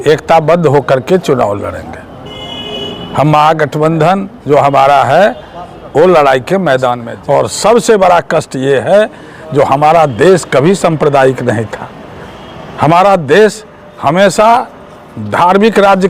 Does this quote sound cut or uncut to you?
cut